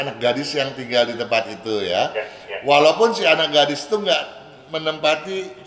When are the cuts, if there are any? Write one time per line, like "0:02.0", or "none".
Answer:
none